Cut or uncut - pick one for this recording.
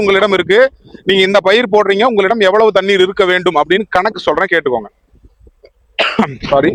uncut